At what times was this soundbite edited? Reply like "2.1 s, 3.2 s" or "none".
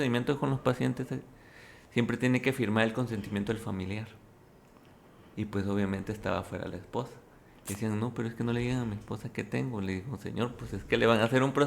none